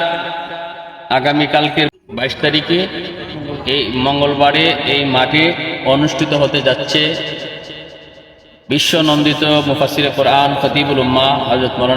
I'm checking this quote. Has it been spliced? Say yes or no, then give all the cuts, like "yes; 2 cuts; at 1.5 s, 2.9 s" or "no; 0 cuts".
no; 0 cuts